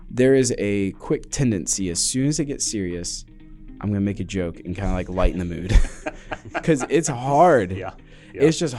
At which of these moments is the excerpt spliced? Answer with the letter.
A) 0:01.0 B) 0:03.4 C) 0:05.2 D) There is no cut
D